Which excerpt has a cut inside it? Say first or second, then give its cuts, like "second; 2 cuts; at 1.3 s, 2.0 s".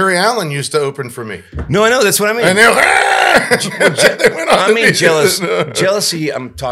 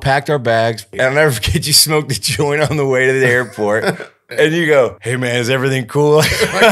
second; 3 cuts; at 0.9 s, 4.2 s, 5.0 s